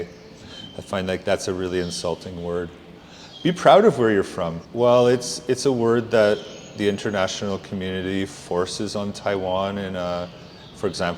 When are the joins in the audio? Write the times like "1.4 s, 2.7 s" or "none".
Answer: none